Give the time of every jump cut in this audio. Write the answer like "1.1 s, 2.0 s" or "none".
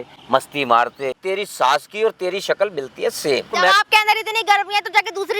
1.2 s, 3.6 s